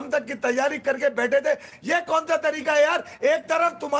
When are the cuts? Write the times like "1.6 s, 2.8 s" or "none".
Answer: none